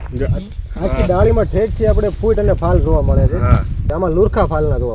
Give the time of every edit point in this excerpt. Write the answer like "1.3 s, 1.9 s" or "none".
3.9 s